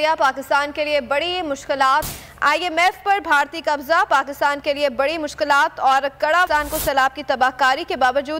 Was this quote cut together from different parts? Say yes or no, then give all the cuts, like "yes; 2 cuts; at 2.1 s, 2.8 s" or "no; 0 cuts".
yes; 1 cut; at 2.1 s